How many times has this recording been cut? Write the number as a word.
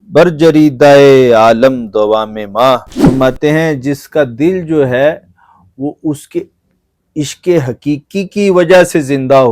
one